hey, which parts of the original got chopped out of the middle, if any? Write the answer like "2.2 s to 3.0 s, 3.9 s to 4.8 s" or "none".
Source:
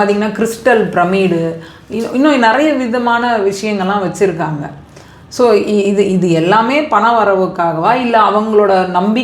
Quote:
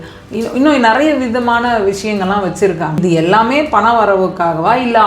4.6 s to 6.2 s

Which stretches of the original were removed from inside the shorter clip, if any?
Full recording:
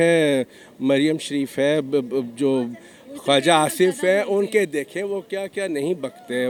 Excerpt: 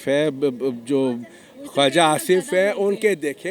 none

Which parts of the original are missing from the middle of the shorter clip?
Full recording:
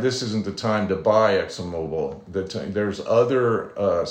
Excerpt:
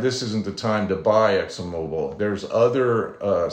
2.1 s to 2.7 s

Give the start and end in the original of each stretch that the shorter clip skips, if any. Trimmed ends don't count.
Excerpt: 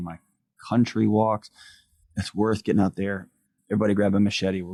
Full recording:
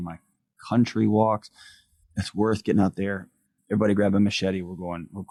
none

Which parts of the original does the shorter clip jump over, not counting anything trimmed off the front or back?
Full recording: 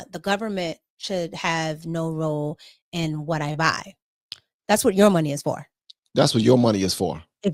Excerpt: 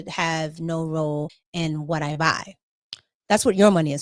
2.7 s to 2.8 s

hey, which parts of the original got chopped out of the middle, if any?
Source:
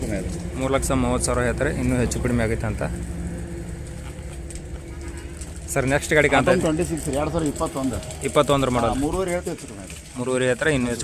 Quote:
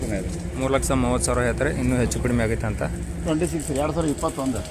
3.3 s to 6.6 s

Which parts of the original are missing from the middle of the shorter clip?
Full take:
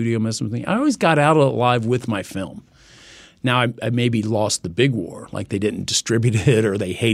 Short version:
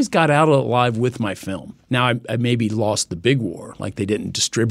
2.6 s to 3.2 s

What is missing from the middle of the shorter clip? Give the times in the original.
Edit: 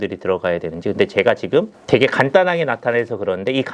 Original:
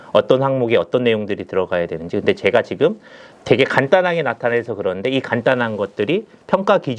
3.0 s to 3.3 s

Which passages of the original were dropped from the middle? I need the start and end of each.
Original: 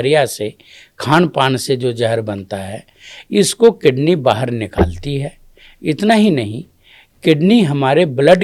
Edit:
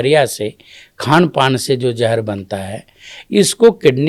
none

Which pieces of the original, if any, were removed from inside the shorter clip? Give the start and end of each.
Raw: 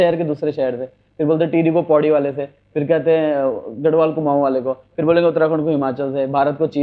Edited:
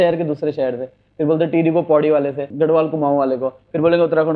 2.4 s to 3.7 s

